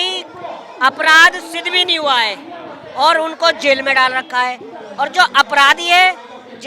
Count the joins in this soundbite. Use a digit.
0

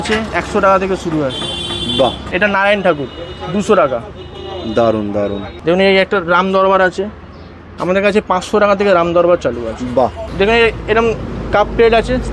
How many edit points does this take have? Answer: 3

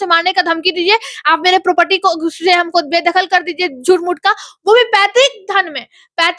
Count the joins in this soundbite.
0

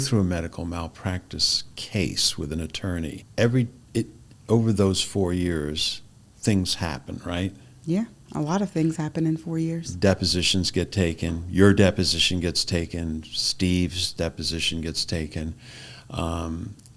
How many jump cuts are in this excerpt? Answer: 1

